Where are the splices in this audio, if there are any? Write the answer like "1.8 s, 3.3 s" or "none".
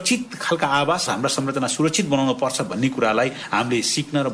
1.1 s